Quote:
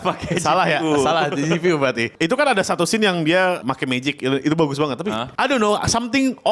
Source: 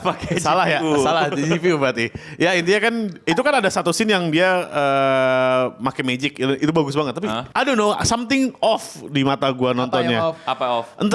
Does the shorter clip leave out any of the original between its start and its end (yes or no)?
yes